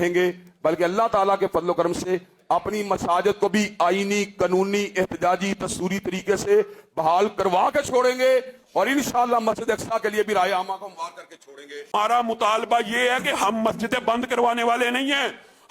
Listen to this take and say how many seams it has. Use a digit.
1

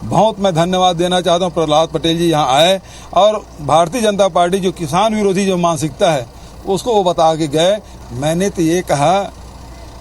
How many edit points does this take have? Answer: 1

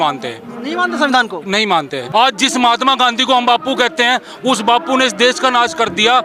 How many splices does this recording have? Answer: 1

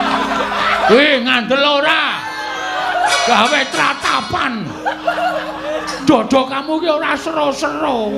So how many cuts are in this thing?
0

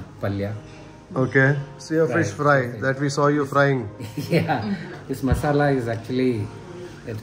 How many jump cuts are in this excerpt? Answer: 2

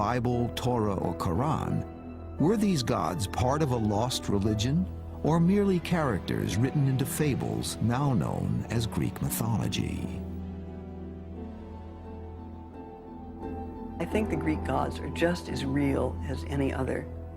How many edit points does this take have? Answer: 1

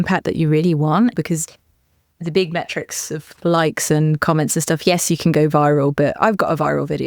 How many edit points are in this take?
2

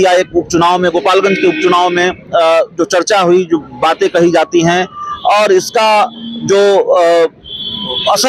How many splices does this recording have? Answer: 0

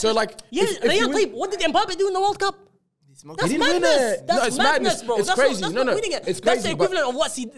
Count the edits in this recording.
0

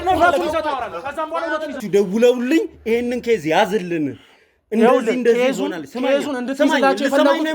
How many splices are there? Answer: 1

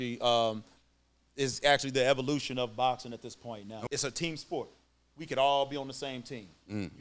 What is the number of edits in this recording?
1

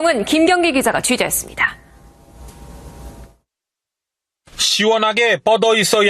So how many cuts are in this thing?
1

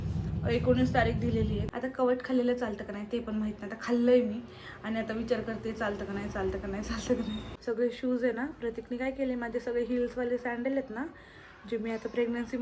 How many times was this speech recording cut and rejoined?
2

